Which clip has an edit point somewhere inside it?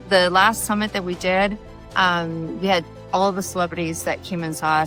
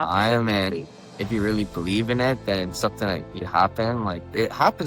second; 1 cut; at 3.3 s

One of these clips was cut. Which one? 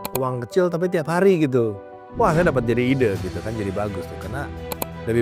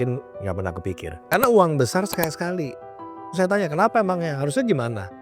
second; 1 cut; at 1.1 s

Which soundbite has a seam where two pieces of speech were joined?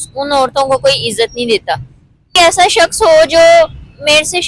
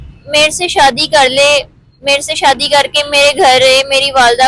first; 1 cut; at 2.3 s

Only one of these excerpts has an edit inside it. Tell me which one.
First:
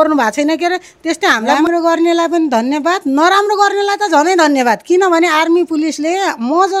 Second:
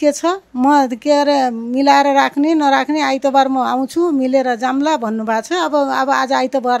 first; 1 cut; at 1.6 s

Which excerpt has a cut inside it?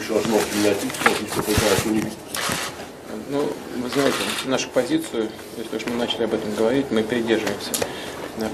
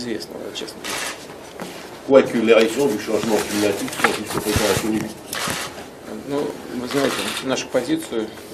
first; 1 cut; at 6.6 s

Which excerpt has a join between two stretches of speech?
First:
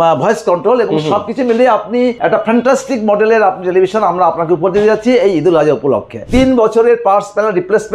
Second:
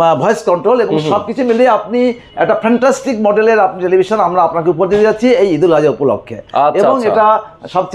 first; 2 cuts; at 2.2 s, 6.3 s

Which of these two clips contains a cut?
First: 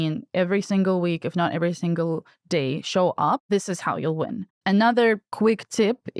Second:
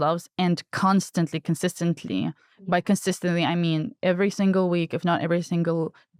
first; 3 cuts; at 3.4 s, 4.5 s, 5.3 s

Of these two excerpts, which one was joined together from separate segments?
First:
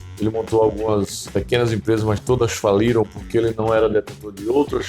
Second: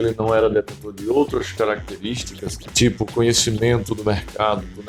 first; 1 cut; at 1.2 s

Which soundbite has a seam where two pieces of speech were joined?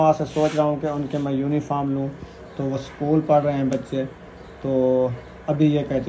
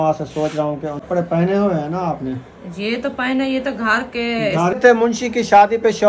second; 2 cuts; at 1.1 s, 4.8 s

